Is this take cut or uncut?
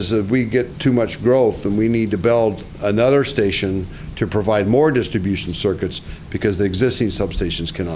uncut